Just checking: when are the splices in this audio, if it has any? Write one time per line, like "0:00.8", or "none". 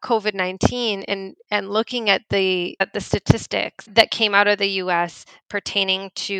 0:03.9